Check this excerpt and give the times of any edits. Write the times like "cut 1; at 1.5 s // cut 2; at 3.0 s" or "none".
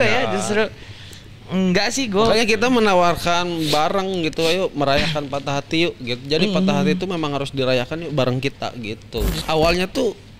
cut 1; at 9.4 s